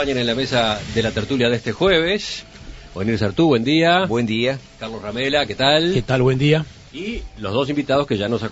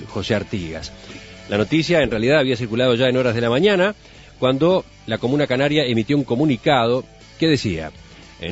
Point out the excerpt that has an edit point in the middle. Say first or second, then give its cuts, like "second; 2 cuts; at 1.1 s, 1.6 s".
second; 1 cut; at 1.9 s